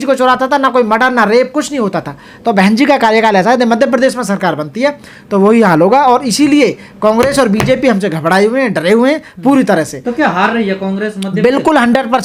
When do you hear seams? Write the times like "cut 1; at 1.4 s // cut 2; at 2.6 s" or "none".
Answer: none